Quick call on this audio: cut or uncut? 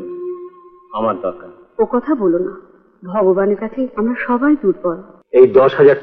cut